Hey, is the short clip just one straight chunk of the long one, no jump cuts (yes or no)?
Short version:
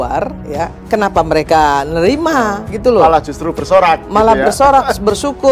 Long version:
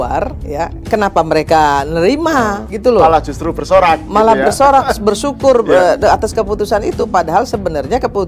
yes